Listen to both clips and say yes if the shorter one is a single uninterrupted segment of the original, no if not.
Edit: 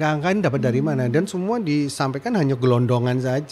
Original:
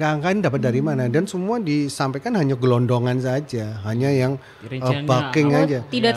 yes